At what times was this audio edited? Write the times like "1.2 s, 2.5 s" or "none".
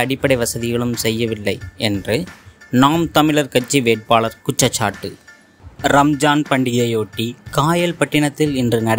5.7 s